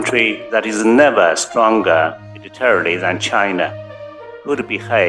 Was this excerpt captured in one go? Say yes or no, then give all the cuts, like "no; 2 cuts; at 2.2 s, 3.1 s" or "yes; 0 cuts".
yes; 0 cuts